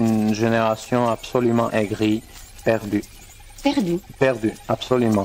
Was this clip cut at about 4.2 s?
no; 1 cut; at 2.6 s

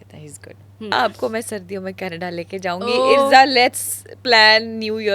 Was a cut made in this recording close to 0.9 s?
yes; 1 cut; at 0.9 s

